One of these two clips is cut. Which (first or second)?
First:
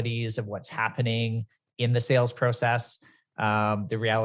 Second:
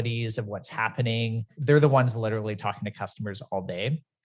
second